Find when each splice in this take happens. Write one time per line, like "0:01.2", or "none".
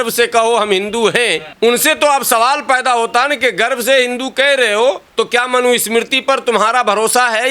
0:05.1